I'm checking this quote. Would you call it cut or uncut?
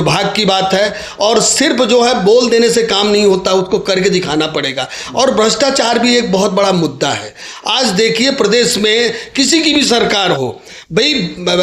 uncut